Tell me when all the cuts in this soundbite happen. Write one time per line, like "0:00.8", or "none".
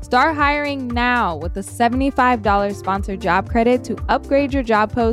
none

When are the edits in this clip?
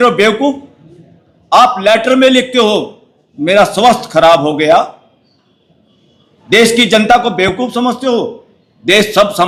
none

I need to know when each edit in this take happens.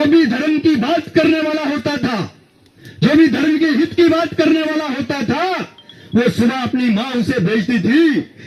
none

